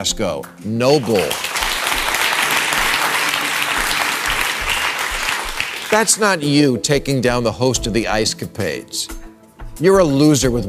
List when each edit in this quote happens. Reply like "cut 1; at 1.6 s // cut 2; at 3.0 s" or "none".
none